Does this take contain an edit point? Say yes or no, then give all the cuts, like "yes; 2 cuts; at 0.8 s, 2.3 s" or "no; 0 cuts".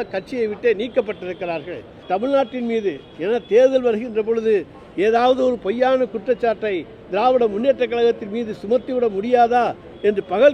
yes; 1 cut; at 2.0 s